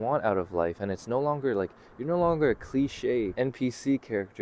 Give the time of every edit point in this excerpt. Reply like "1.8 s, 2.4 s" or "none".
3.3 s

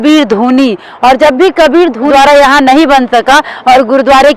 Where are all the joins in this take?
2.1 s

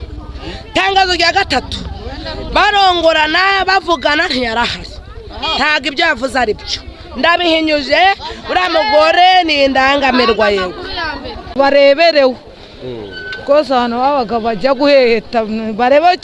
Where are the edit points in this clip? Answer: 11.4 s

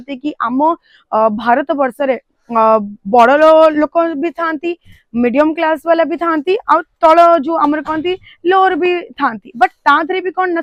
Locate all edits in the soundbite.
none

